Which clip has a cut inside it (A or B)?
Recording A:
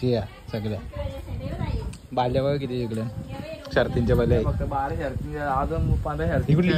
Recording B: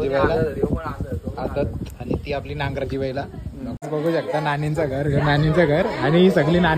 B